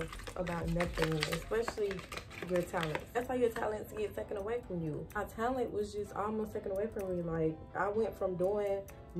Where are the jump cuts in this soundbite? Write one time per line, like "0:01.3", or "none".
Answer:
0:03.2
0:05.2